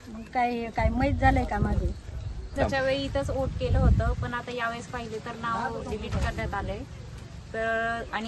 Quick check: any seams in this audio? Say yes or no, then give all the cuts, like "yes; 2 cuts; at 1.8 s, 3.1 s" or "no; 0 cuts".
yes; 1 cut; at 2.6 s